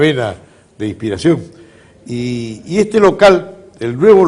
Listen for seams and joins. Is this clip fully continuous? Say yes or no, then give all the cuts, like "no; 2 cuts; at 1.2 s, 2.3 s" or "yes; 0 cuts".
no; 1 cut; at 2.2 s